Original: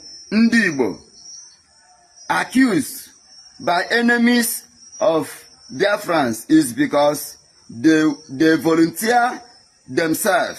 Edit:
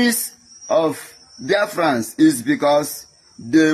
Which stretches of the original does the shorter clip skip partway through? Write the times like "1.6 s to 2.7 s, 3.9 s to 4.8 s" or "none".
none